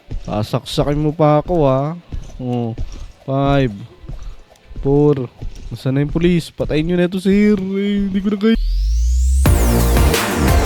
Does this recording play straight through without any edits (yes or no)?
no